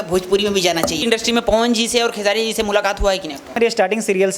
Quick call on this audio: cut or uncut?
cut